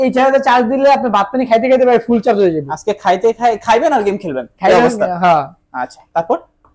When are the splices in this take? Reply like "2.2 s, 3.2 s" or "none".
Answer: none